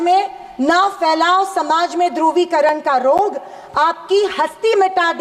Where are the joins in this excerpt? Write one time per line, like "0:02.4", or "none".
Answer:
none